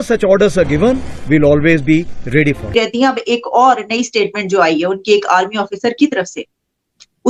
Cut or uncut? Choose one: uncut